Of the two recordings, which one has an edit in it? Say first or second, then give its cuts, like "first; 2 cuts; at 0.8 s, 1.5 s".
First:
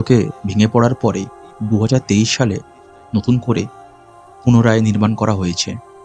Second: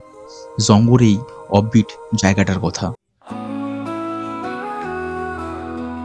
second; 1 cut; at 3.1 s